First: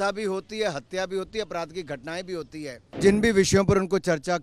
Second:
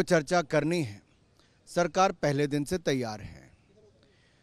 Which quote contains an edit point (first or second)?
first